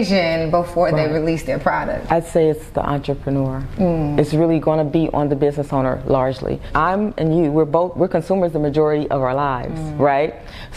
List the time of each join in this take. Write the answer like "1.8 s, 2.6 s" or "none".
2.1 s, 6.7 s